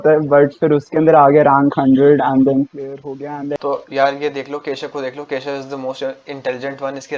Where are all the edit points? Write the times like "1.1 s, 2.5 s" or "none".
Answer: none